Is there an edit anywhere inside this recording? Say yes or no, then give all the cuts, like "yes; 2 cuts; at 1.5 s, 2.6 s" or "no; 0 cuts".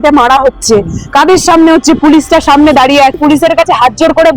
yes; 1 cut; at 3.2 s